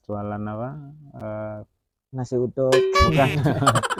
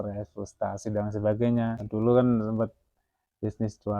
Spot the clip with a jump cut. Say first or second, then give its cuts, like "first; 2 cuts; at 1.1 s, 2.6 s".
second; 1 cut; at 1.8 s